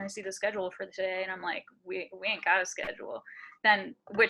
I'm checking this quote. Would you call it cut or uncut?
uncut